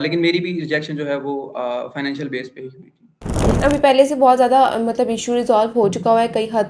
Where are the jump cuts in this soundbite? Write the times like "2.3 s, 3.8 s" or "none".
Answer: 3.5 s